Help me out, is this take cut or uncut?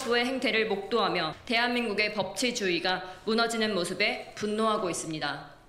cut